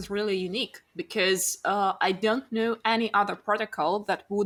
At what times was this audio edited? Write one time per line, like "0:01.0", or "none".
none